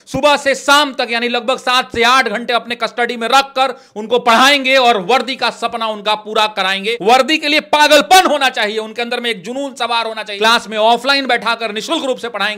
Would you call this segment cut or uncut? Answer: cut